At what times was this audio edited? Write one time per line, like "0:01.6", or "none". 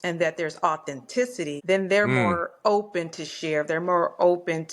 0:01.6